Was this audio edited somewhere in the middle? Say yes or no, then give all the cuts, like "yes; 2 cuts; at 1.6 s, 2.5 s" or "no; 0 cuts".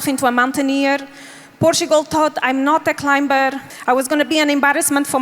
no; 0 cuts